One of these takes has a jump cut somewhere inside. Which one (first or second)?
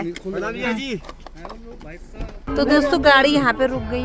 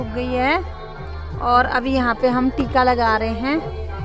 first